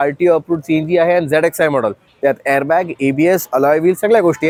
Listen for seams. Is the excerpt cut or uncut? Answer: uncut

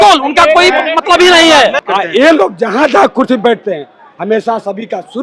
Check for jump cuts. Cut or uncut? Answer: cut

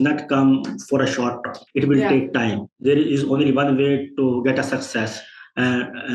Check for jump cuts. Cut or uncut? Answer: uncut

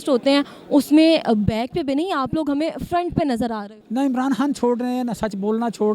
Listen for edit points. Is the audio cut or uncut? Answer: cut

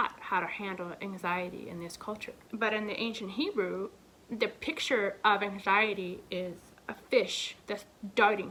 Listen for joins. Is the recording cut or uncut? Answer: uncut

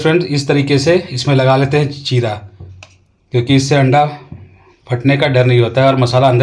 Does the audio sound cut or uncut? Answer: uncut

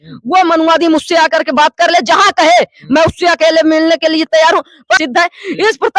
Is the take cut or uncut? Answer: cut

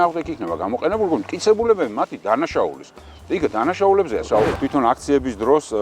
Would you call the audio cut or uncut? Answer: cut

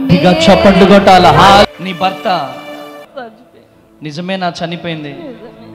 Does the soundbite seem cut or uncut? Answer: cut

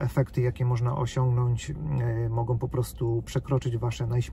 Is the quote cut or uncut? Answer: uncut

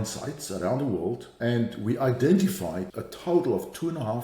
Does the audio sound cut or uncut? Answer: cut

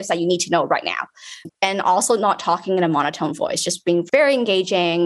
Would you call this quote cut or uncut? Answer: cut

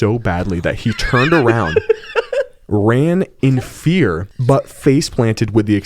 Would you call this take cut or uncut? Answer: cut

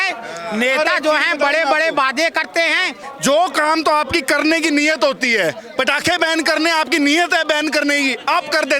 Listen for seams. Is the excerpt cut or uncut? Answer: cut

